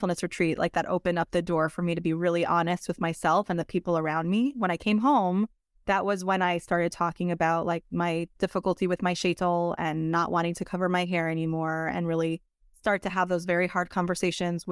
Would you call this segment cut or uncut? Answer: uncut